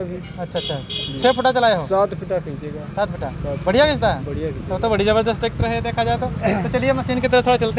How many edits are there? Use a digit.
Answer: 0